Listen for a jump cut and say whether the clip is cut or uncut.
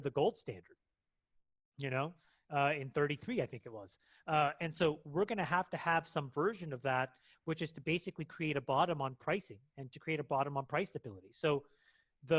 uncut